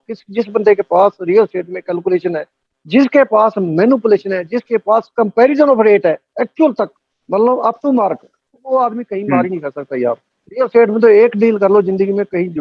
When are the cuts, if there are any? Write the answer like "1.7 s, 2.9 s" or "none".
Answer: none